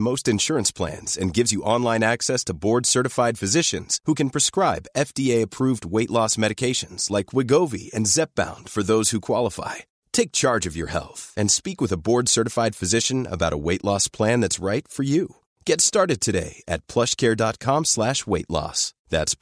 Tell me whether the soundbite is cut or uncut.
uncut